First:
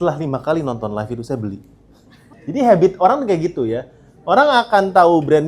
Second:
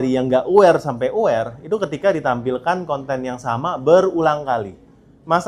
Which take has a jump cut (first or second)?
first